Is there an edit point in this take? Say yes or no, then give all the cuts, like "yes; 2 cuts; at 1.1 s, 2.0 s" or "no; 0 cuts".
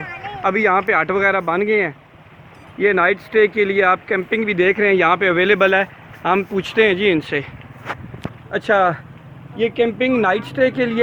no; 0 cuts